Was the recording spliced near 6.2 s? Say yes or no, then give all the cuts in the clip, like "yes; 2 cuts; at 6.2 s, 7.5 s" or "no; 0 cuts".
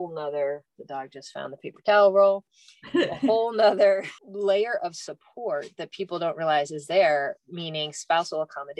no; 0 cuts